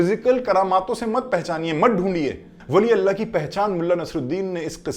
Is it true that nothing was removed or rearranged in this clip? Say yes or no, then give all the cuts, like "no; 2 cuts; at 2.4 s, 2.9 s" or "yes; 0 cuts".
no; 1 cut; at 2.5 s